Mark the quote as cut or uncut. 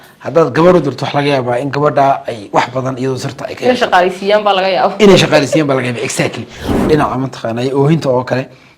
cut